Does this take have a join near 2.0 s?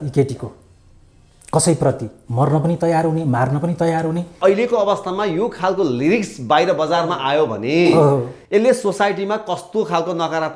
no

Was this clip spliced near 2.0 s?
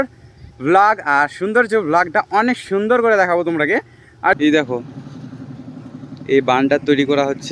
no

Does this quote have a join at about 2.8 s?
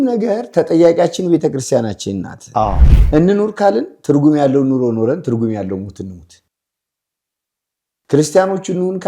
yes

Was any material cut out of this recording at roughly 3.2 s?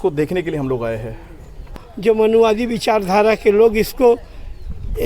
no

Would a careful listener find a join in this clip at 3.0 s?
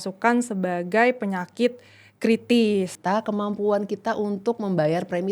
yes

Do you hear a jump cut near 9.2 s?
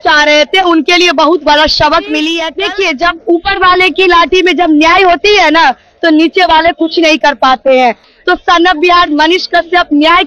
no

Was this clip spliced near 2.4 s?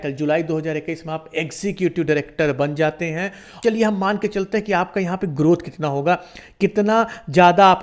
no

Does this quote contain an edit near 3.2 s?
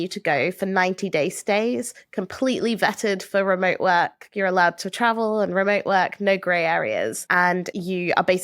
no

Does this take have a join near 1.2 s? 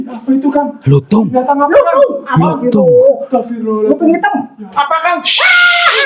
no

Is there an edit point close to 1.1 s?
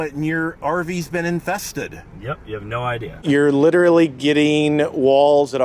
no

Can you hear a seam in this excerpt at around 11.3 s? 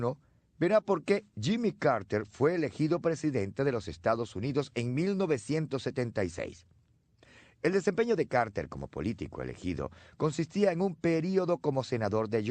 yes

